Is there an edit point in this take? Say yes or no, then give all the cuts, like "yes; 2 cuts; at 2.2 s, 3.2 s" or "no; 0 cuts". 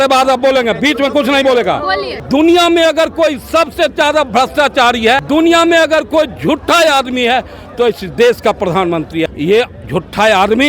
yes; 3 cuts; at 2.2 s, 5.2 s, 9.3 s